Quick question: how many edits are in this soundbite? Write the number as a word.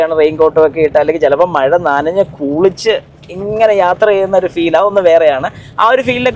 zero